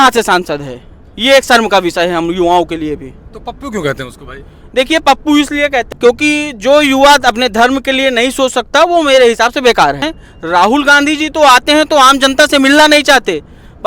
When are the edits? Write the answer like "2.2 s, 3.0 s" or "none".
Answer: 5.8 s, 10.2 s